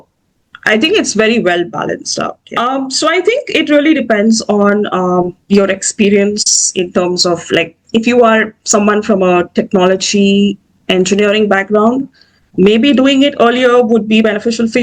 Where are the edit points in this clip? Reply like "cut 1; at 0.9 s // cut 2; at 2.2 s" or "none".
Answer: cut 1; at 2.4 s